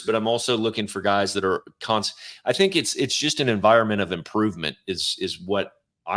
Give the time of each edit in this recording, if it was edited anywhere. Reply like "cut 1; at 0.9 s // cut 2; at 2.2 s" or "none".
none